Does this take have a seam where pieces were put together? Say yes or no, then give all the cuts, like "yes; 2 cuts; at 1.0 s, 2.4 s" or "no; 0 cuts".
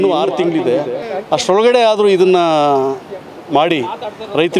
no; 0 cuts